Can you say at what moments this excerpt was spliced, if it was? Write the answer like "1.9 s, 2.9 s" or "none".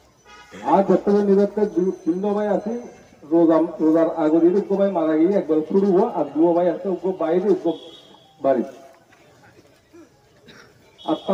none